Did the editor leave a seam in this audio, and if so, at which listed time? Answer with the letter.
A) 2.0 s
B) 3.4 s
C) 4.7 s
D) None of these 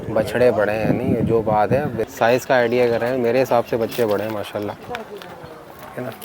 A